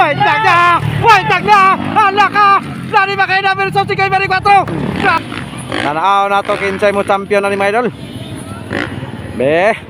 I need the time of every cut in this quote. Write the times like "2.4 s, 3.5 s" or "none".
5.2 s